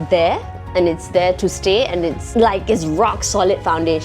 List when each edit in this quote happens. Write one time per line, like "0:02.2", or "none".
0:02.2